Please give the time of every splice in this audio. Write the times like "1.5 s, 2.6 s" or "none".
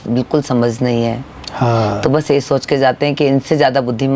none